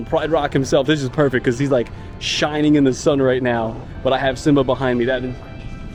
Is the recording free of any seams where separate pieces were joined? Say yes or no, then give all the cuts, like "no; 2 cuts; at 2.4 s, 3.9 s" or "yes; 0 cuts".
yes; 0 cuts